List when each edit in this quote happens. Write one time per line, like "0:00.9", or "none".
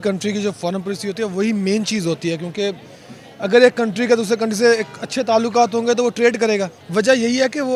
0:06.8